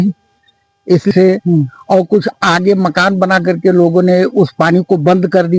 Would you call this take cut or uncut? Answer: cut